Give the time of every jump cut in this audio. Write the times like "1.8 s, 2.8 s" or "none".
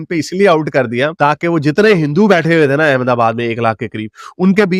none